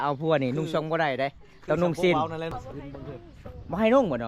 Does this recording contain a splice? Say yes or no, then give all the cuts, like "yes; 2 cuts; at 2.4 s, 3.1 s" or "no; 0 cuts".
yes; 1 cut; at 2.5 s